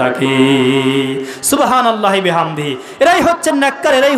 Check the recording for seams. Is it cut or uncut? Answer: uncut